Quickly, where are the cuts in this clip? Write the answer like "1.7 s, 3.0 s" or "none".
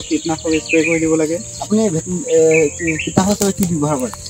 none